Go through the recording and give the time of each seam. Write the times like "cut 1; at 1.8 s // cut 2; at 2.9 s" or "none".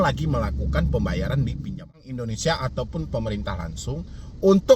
cut 1; at 2.1 s